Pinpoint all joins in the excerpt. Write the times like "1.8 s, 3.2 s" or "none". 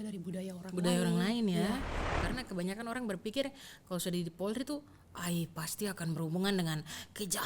2.0 s